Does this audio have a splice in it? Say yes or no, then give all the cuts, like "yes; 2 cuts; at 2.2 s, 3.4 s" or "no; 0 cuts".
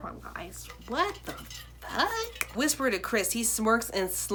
no; 0 cuts